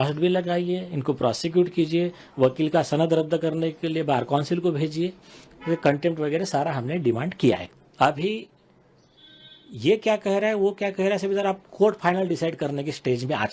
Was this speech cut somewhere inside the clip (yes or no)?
yes